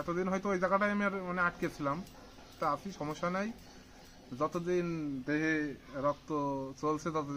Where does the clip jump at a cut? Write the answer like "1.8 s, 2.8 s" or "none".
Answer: 2.5 s